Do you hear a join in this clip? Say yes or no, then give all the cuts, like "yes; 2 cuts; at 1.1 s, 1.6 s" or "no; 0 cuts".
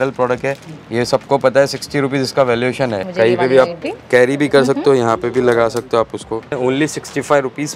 yes; 2 cuts; at 3.0 s, 6.6 s